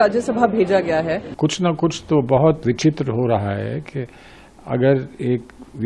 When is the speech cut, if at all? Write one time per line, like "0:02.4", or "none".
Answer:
0:01.3